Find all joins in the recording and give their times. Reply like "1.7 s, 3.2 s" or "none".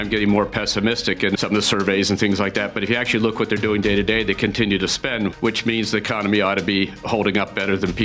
1.4 s, 5.3 s